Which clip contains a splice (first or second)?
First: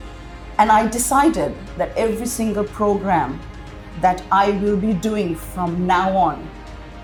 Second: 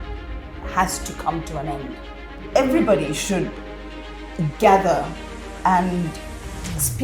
second